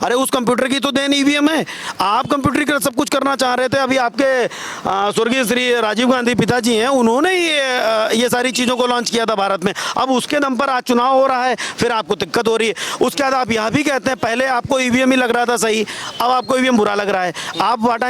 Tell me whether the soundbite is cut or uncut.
uncut